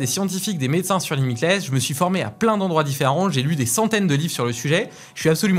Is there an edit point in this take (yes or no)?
no